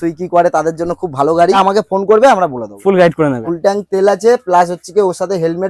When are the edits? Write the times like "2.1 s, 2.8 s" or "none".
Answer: 1.6 s, 3.4 s

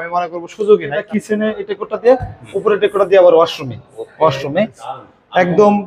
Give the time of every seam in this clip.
1.0 s, 4.8 s

